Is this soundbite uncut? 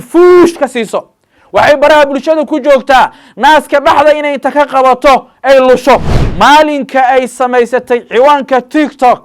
no; 1 cut; at 6.2 s

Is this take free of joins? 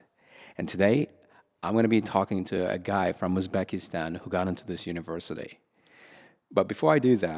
yes; 0 cuts

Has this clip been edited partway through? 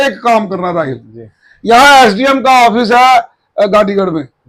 no; 0 cuts

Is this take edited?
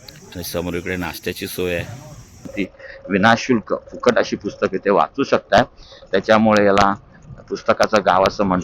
yes; 1 cut; at 2.5 s

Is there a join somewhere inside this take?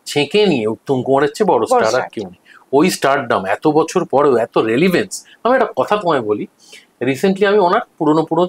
no; 0 cuts

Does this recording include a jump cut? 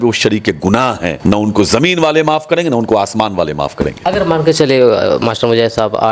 yes; 2 cuts; at 1.1 s, 4.0 s

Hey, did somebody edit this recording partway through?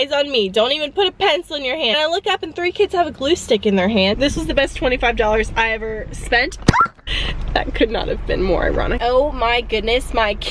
yes; 4 cuts; at 1.9 s, 4.2 s, 6.9 s, 9.0 s

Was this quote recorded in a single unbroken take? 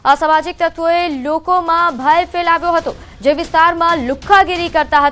yes; 0 cuts

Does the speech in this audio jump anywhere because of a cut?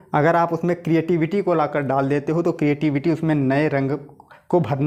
no; 0 cuts

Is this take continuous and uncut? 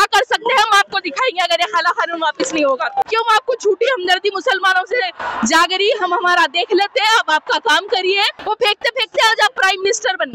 no; 2 cuts; at 3.0 s, 8.3 s

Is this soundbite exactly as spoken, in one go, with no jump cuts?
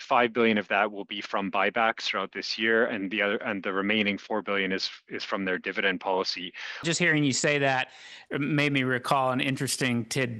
no; 1 cut; at 6.8 s

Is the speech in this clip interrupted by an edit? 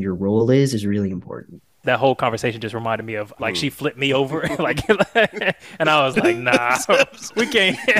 yes; 2 cuts; at 1.8 s, 3.3 s

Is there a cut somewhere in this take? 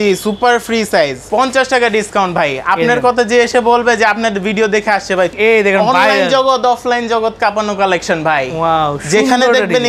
yes; 2 cuts; at 1.2 s, 5.3 s

